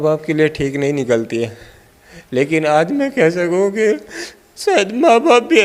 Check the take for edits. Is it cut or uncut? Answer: uncut